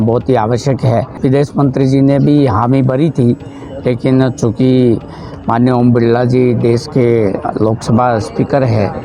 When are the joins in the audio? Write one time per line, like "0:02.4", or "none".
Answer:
0:01.1